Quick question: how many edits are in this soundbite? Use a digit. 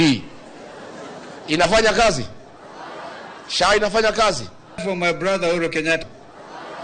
2